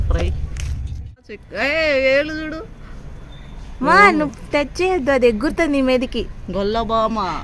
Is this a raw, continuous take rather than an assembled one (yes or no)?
no